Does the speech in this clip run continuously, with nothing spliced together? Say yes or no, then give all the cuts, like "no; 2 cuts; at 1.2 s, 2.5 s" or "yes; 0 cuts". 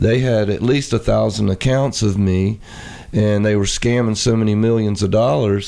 yes; 0 cuts